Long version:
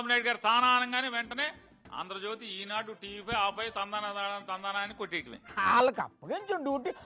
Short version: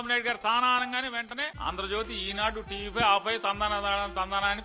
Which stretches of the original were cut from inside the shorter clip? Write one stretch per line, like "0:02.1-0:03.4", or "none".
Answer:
0:01.5-0:01.9